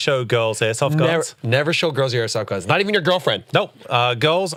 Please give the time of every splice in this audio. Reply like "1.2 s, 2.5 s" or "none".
none